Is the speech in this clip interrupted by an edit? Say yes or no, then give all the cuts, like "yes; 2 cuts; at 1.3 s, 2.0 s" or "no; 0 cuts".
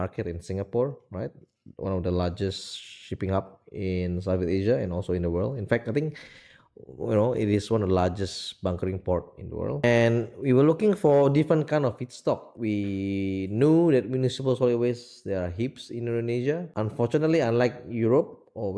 yes; 3 cuts; at 9.8 s, 12.5 s, 16.7 s